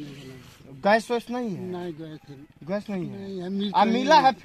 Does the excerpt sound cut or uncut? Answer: uncut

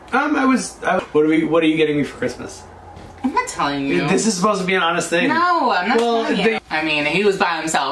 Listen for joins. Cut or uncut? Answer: cut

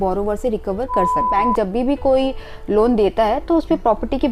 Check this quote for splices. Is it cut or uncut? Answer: cut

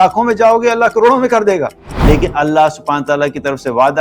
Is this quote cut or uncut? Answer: cut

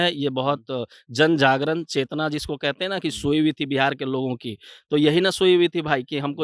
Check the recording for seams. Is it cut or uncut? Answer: uncut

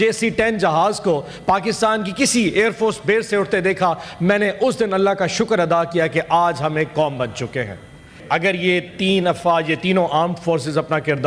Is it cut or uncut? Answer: cut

